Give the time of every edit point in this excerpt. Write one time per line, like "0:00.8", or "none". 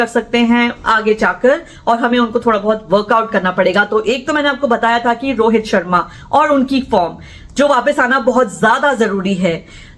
none